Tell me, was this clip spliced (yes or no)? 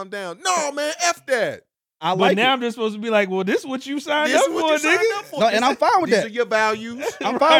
no